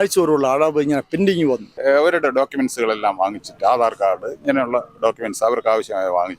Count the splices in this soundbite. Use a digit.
1